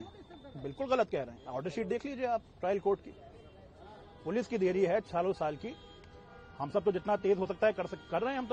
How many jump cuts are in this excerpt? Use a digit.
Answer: 0